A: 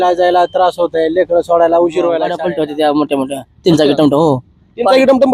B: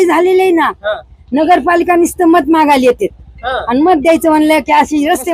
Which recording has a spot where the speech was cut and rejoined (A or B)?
A